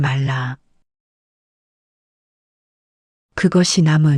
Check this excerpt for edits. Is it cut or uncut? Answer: uncut